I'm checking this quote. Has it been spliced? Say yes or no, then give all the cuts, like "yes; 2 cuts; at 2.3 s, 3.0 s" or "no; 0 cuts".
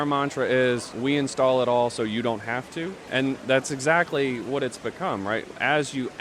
yes; 2 cuts; at 0.9 s, 3.0 s